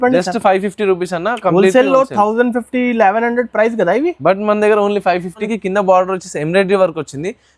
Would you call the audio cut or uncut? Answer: cut